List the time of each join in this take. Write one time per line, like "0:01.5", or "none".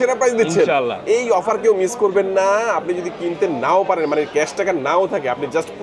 none